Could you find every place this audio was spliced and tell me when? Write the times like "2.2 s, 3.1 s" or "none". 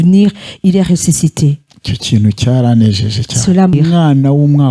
3.7 s